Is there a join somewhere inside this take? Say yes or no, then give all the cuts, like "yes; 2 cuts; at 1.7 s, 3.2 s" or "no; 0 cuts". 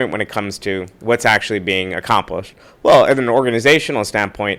no; 0 cuts